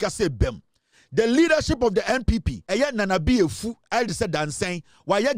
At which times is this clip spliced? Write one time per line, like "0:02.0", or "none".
0:02.6